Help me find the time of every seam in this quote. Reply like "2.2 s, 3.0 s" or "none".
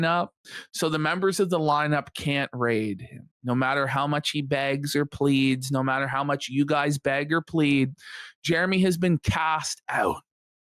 none